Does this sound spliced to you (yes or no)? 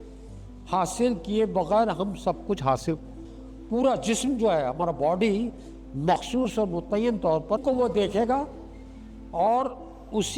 yes